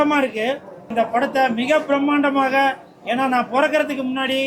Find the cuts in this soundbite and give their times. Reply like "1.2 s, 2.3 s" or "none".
0.9 s